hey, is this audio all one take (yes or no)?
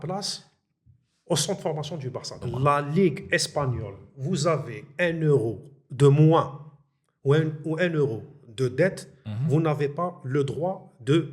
no